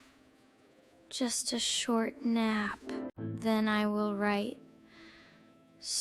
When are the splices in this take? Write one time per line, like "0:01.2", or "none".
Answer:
none